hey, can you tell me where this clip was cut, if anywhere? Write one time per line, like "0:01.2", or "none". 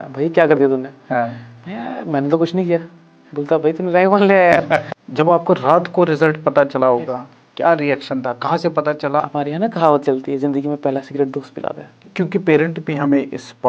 0:04.9
0:09.2
0:12.0